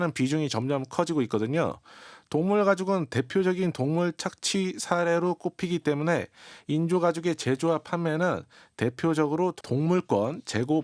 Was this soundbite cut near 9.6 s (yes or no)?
yes